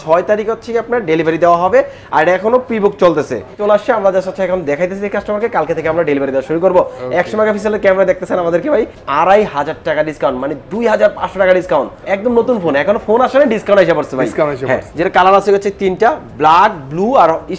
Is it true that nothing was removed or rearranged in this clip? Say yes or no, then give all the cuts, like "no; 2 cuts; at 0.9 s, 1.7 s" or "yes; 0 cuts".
no; 3 cuts; at 3.6 s, 9.0 s, 14.9 s